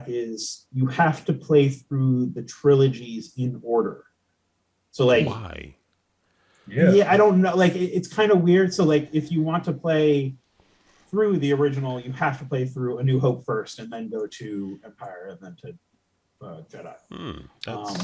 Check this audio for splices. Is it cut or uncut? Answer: uncut